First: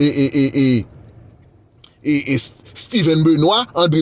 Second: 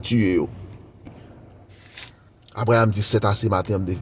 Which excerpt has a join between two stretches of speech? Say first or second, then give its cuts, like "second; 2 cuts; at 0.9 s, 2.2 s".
second; 1 cut; at 1.1 s